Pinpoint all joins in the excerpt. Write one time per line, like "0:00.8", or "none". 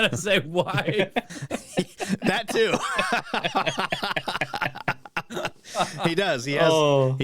none